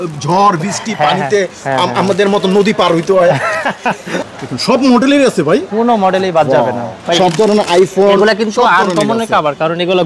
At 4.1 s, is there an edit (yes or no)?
yes